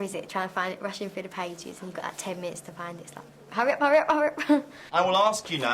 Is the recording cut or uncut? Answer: cut